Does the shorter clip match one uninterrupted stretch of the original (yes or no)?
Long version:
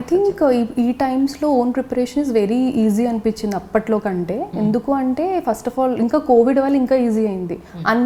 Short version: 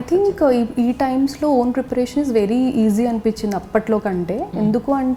yes